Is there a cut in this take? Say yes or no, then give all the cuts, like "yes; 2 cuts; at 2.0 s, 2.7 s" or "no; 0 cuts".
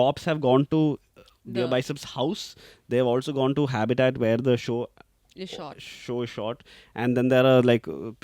no; 0 cuts